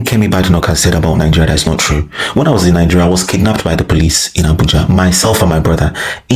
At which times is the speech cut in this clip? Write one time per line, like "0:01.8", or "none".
none